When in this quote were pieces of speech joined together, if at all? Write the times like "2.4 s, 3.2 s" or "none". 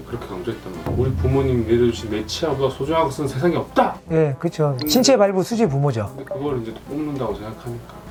none